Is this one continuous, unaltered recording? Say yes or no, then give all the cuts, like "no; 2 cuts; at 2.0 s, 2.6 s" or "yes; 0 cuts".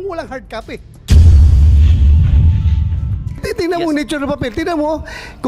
no; 1 cut; at 0.9 s